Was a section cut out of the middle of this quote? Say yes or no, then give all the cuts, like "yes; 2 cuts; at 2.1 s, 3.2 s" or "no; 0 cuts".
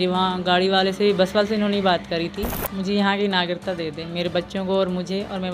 yes; 1 cut; at 2.6 s